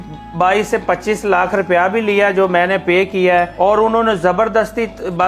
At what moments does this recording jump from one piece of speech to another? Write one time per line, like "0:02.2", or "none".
0:03.5